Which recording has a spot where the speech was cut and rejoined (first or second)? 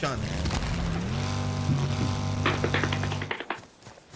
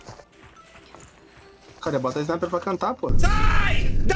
first